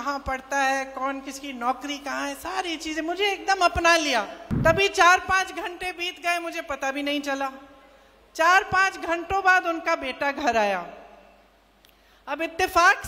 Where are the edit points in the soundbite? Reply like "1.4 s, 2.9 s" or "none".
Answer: 4.4 s